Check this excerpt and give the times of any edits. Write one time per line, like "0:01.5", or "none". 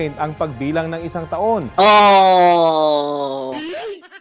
none